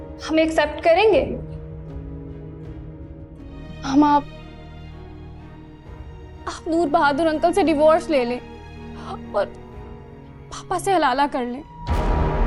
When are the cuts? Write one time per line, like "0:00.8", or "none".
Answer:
0:03.6